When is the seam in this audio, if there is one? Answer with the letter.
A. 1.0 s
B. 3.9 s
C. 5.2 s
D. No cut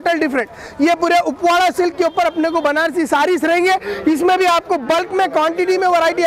D